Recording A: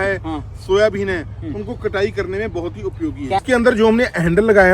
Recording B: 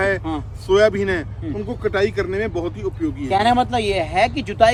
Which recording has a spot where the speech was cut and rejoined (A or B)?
A